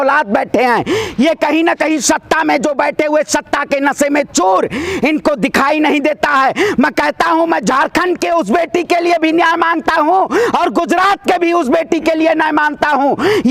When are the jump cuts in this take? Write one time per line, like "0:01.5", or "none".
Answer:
none